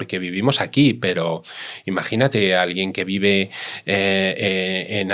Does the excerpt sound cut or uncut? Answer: uncut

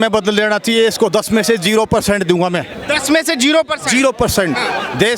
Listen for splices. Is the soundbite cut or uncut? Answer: uncut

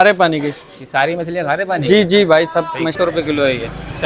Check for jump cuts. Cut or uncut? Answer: cut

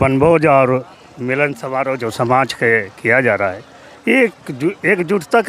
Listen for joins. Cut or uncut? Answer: uncut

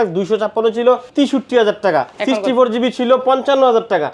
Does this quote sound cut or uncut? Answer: cut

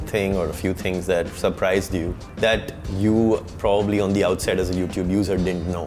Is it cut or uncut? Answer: uncut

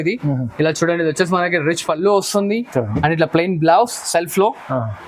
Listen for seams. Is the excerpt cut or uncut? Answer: uncut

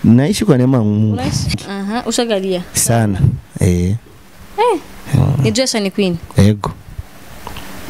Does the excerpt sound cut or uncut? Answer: cut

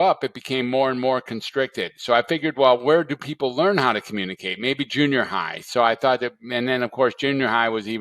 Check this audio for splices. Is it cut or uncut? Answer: uncut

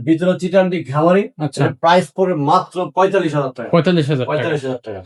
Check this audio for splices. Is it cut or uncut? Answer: uncut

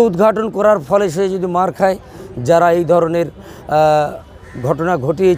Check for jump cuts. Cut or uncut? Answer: cut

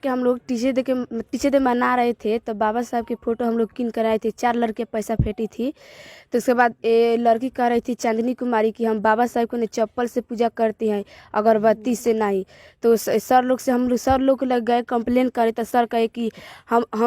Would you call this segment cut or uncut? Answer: cut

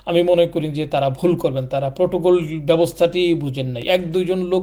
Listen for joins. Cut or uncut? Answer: uncut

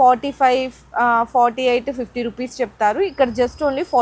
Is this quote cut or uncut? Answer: uncut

